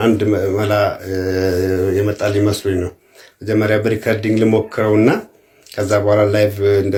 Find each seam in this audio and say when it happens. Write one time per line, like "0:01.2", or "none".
none